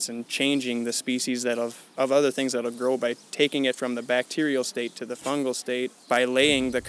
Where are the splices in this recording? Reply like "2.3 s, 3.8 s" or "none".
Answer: 6.0 s